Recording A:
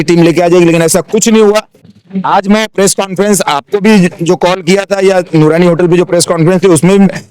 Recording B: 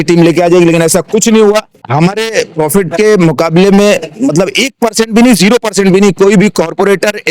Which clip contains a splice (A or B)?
B